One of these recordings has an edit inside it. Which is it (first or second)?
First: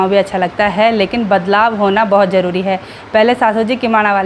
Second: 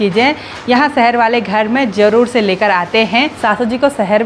second